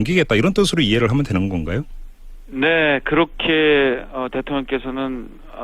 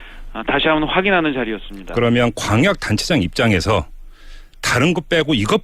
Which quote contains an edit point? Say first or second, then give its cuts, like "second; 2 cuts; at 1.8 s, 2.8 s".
first; 1 cut; at 2.4 s